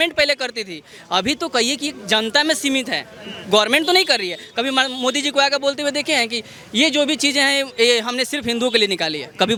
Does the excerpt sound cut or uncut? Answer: uncut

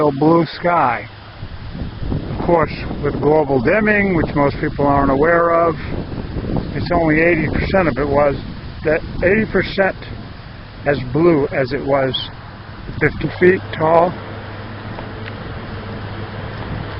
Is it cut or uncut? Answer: uncut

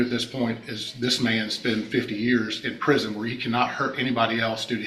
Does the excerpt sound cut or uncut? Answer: uncut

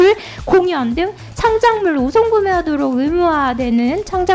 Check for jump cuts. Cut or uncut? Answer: uncut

